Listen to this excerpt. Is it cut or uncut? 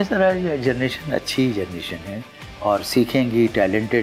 uncut